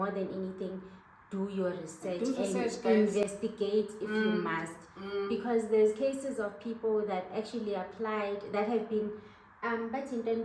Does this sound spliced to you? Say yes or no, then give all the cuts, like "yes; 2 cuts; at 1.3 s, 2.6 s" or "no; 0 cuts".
no; 0 cuts